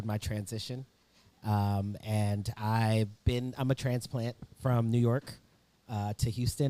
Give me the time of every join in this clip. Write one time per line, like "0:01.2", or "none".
none